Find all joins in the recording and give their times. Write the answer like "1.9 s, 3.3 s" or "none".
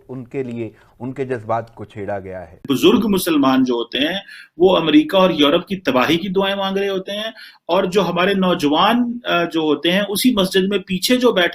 2.6 s